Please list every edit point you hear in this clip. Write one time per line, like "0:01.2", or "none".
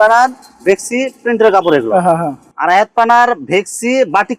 0:02.4